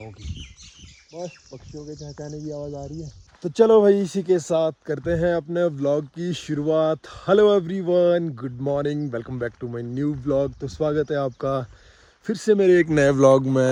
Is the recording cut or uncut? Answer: uncut